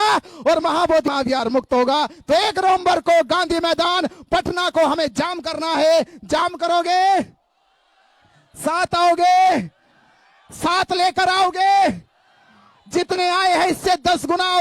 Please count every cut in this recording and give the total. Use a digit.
1